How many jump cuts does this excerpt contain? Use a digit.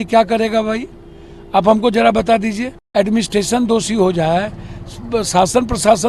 1